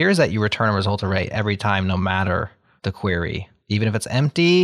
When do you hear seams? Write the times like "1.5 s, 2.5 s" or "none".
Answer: none